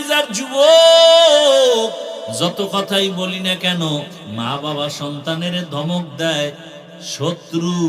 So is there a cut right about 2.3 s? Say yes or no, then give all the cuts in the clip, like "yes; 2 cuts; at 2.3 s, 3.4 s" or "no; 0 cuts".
yes; 2 cuts; at 2.3 s, 4.2 s